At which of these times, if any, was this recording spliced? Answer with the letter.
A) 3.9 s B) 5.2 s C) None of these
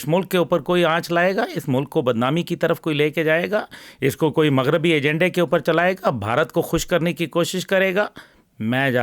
C